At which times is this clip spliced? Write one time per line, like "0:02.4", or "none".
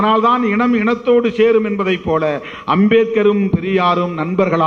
none